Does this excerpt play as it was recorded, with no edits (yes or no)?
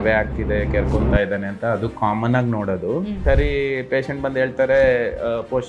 no